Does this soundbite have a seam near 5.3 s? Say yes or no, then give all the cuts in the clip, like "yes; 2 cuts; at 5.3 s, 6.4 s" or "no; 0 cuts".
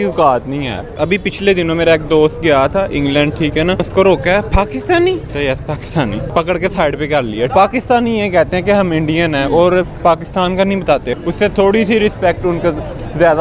yes; 6 cuts; at 1.0 s, 3.8 s, 5.3 s, 6.3 s, 7.5 s, 11.1 s